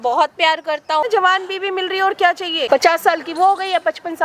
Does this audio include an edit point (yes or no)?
yes